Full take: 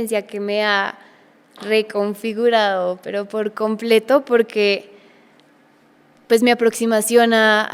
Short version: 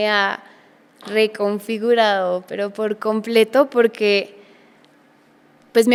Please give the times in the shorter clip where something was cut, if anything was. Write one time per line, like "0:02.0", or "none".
none